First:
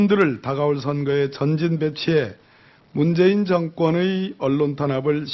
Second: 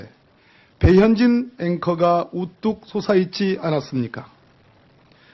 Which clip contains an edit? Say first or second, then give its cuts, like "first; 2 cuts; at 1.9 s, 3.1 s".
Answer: first; 1 cut; at 2.2 s